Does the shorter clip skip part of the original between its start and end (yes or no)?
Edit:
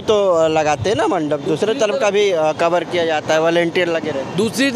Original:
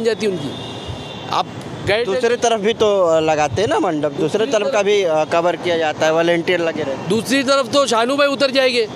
no